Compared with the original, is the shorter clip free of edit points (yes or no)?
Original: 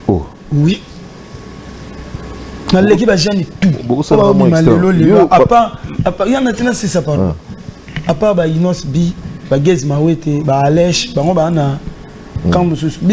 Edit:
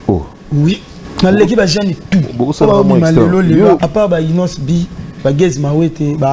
no